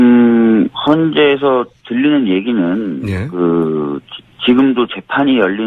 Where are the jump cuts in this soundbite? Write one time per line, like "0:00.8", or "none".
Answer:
0:04.1